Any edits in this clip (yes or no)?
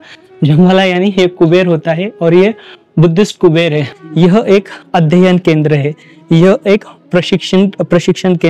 yes